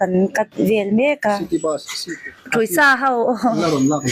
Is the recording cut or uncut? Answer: cut